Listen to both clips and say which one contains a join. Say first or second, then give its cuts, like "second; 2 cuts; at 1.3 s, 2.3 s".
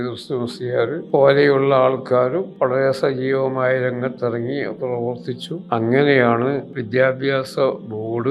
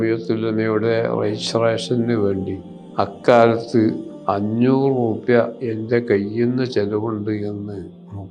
first; 4 cuts; at 1.0 s, 2.5 s, 5.5 s, 6.7 s